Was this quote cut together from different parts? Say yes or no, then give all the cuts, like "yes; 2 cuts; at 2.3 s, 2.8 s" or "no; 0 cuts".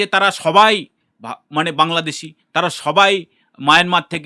no; 0 cuts